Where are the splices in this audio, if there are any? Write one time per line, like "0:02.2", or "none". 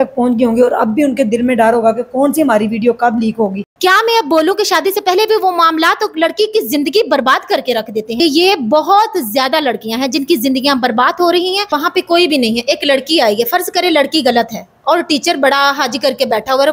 0:03.7
0:08.1
0:11.8